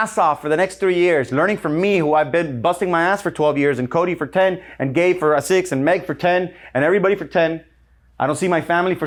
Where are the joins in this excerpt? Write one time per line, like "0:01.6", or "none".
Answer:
none